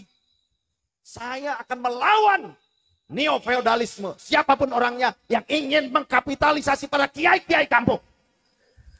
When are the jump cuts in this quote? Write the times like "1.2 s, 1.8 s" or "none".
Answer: none